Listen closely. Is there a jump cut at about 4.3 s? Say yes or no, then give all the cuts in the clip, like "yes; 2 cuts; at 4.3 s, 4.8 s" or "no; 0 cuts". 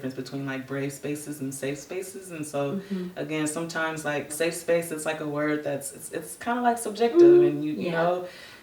yes; 1 cut; at 4.3 s